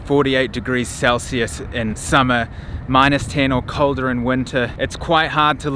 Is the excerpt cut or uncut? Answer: uncut